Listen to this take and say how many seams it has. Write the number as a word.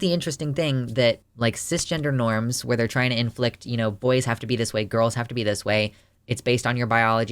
one